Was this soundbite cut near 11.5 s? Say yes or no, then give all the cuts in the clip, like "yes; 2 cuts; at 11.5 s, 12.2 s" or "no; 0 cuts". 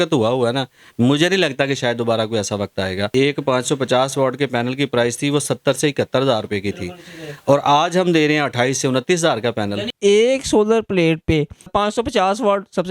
no; 2 cuts; at 3.1 s, 9.9 s